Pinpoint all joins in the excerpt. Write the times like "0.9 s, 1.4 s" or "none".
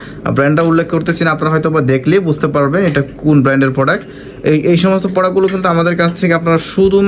none

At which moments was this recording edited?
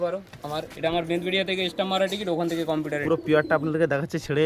3.0 s

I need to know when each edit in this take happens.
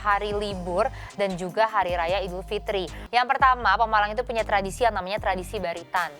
3.0 s

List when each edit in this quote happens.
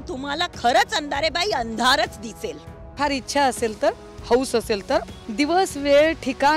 3.0 s, 5.2 s

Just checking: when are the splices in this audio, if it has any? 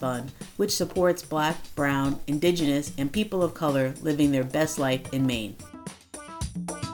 none

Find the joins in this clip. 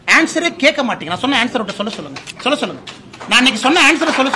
none

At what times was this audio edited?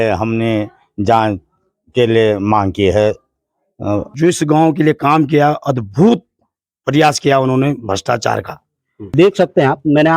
4.1 s, 9.1 s

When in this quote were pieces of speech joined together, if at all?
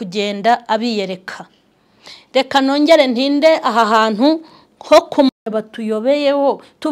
5.3 s

